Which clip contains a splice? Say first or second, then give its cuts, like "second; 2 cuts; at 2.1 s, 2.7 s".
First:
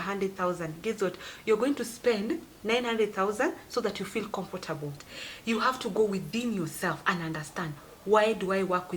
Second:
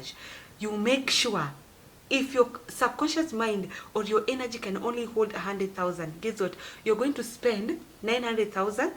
first; 1 cut; at 5.0 s